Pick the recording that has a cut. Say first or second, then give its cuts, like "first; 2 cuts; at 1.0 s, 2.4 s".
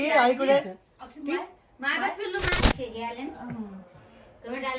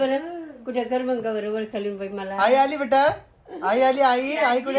first; 1 cut; at 2.6 s